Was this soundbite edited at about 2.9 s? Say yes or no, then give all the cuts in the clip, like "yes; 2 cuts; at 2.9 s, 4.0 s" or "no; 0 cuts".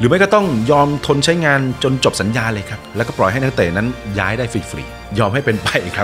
no; 1 cut; at 5.0 s